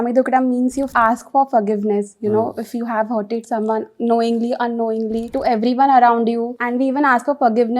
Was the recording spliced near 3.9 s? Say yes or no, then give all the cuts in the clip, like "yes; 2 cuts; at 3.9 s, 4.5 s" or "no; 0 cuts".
no; 3 cuts; at 0.9 s, 5.3 s, 6.6 s